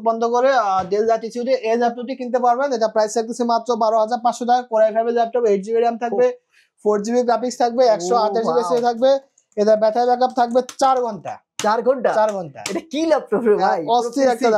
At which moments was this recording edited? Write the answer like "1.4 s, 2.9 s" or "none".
none